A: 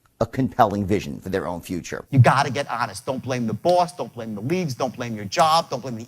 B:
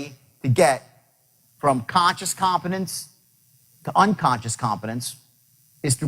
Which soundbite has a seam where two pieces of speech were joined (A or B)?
A